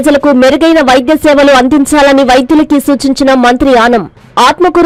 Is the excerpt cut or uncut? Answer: uncut